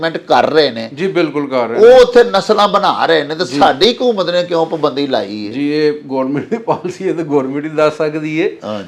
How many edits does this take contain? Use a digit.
0